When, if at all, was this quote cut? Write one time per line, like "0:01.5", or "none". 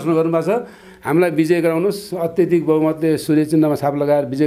0:00.9

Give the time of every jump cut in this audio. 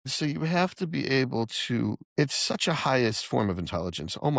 0:02.0

